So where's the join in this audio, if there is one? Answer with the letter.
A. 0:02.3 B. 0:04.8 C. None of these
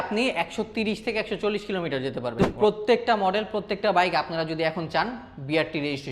A